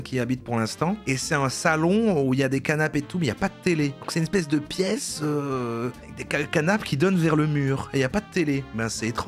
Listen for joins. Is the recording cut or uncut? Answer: uncut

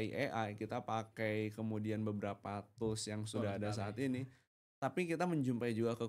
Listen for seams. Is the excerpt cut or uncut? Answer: uncut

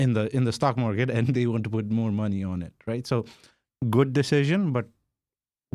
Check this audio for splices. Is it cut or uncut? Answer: uncut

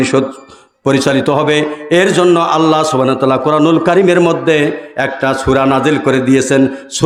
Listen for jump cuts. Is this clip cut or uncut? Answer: uncut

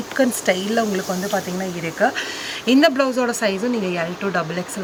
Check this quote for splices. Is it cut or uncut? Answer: uncut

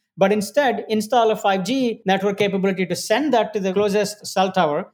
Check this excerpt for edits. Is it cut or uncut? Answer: cut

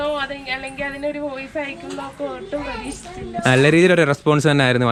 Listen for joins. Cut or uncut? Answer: uncut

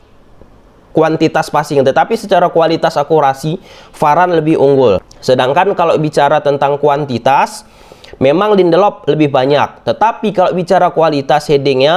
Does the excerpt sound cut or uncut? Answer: cut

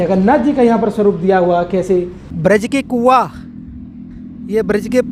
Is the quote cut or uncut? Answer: cut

